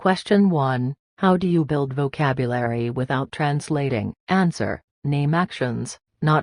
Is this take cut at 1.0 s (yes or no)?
no